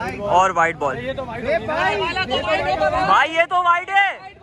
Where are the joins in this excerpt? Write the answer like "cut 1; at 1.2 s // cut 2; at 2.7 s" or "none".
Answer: none